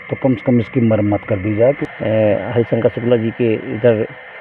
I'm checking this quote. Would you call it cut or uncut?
cut